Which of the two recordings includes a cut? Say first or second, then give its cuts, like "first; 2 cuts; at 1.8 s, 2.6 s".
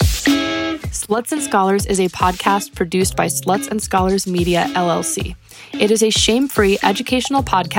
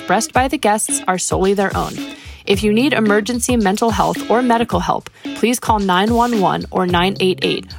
first; 1 cut; at 0.9 s